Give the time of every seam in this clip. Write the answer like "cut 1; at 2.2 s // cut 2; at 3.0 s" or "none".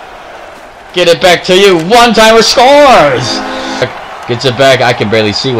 cut 1; at 3.9 s